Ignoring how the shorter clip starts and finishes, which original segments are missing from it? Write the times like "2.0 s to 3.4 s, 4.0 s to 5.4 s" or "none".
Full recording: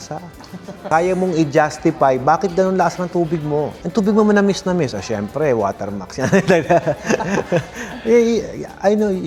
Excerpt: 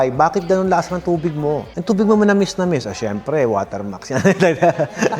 none